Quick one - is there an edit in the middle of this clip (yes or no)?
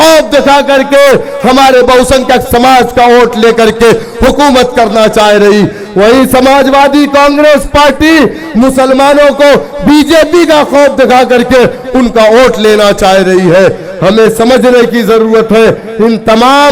no